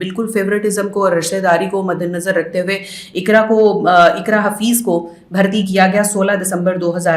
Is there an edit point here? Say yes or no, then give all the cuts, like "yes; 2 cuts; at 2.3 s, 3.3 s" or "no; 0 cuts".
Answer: no; 0 cuts